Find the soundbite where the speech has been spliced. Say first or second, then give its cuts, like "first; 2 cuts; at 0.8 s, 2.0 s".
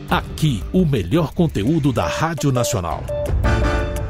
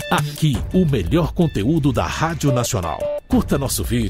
second; 1 cut; at 3.0 s